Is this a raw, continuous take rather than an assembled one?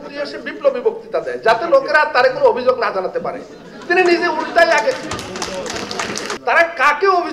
no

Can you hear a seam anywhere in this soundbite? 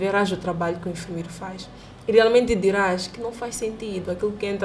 no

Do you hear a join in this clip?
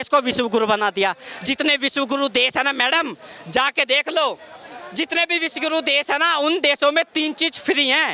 no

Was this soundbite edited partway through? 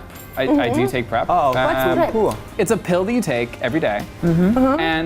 yes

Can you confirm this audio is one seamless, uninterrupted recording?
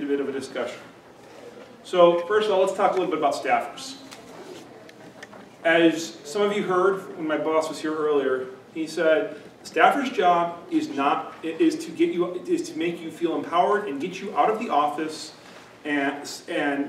no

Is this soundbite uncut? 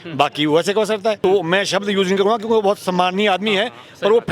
no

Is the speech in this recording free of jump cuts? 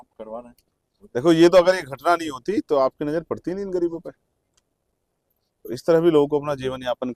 yes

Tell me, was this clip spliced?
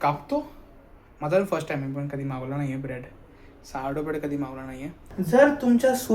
yes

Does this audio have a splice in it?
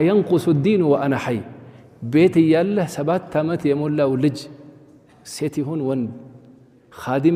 no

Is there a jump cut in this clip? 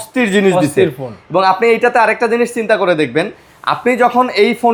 no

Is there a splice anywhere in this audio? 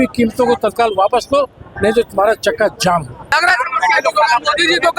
yes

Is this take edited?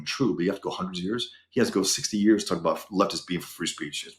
no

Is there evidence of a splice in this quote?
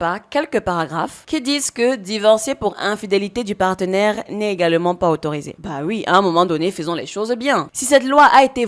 yes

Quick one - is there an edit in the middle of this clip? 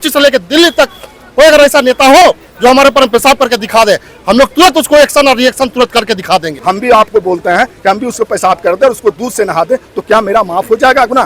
yes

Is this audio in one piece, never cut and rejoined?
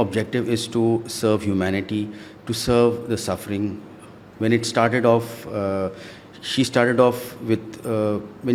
yes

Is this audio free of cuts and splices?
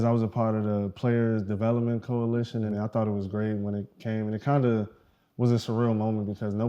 no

